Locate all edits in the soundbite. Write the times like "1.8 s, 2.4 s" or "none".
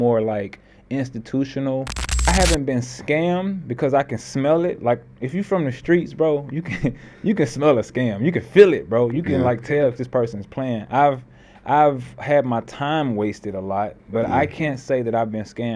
2.3 s